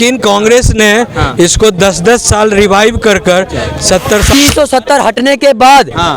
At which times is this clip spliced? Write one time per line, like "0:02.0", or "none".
0:04.3